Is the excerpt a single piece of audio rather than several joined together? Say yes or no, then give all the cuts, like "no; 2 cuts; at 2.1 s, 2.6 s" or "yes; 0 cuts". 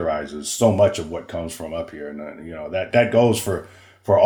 no; 1 cut; at 2.9 s